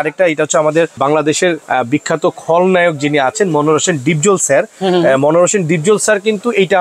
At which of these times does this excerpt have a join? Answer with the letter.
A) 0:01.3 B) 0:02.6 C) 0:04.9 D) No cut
A